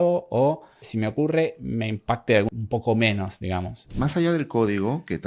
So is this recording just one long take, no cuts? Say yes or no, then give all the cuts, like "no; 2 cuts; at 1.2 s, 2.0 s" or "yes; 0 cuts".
no; 2 cuts; at 2.5 s, 3.9 s